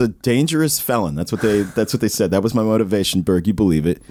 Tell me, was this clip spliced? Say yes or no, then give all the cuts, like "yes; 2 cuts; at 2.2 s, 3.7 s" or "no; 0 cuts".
no; 0 cuts